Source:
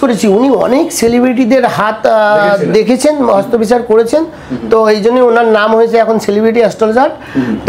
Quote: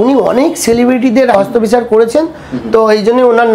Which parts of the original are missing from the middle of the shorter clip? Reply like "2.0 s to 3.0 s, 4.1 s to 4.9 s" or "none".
1.7 s to 3.3 s